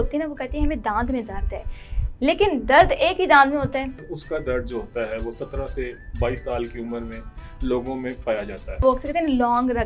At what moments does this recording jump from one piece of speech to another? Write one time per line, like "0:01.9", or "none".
0:04.0
0:08.8